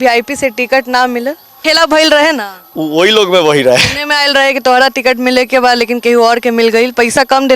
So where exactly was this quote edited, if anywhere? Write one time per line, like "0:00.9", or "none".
0:01.6